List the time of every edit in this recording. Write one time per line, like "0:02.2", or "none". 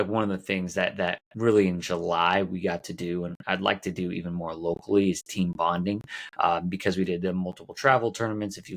none